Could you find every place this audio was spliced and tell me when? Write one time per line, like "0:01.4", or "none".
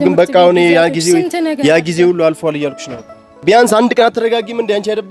0:03.3